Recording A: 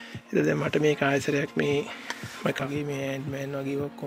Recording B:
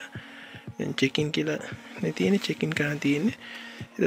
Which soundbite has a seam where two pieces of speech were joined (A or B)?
A